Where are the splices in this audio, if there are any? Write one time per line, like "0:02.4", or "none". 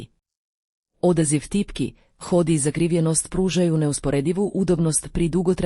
none